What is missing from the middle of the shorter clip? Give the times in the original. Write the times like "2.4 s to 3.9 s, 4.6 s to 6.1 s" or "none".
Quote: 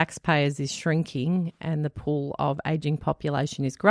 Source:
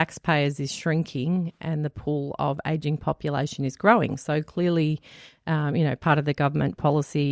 none